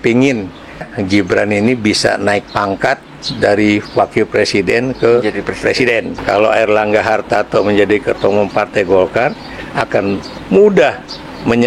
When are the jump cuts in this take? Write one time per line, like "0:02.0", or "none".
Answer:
0:00.9
0:06.2